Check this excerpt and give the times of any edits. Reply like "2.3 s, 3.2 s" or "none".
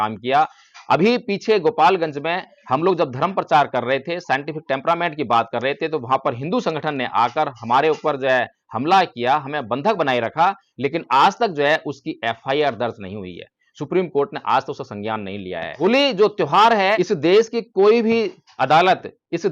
15.7 s, 17.0 s